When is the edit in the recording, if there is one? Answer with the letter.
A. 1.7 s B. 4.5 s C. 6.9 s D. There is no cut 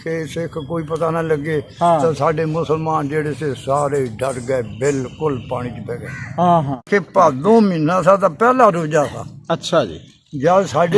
C